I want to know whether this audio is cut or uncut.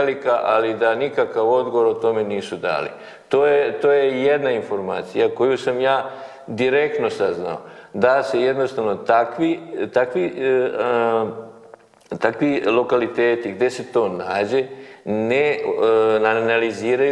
uncut